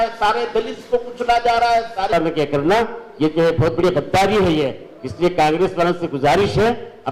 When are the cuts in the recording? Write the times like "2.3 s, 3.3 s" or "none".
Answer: 2.1 s